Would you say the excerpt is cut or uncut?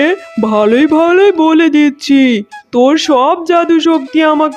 uncut